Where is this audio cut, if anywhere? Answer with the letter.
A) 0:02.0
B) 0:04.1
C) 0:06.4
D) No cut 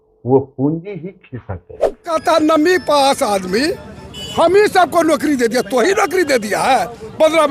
A